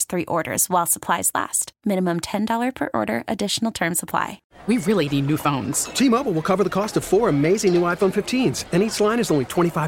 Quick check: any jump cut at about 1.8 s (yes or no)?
no